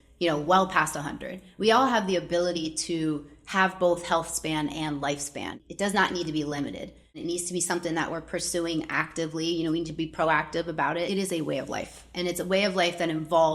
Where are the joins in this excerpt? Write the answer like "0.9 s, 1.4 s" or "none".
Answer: 5.6 s, 7.2 s, 11.1 s